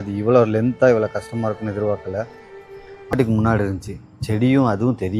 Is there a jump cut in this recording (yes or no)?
yes